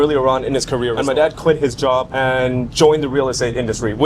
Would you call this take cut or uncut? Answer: cut